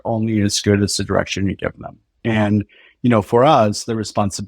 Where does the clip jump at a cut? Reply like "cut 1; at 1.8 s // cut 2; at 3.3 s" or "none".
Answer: cut 1; at 2.1 s